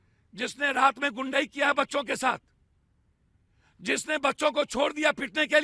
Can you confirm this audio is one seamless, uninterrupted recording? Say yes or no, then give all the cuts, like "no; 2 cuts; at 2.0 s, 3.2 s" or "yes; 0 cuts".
yes; 0 cuts